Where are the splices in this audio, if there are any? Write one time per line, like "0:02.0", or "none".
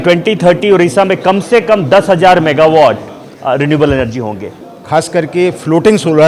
0:04.4